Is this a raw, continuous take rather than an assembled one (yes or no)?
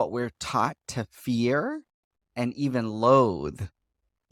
yes